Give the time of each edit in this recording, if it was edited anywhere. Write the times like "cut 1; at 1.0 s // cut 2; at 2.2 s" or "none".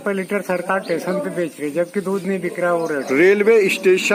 none